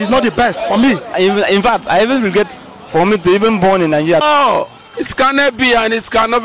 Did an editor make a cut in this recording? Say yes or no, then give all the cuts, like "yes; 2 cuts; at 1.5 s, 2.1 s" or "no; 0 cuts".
yes; 2 cuts; at 1.1 s, 4.2 s